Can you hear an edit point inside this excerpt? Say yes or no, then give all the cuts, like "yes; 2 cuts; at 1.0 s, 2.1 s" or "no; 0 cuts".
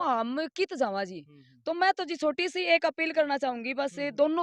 no; 0 cuts